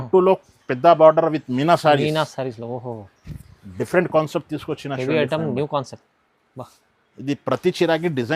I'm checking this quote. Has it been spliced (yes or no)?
no